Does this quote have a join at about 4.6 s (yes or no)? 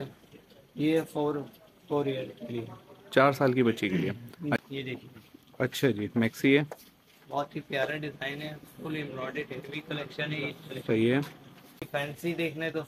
yes